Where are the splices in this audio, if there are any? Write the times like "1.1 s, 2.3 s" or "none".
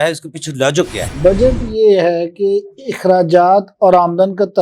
1.1 s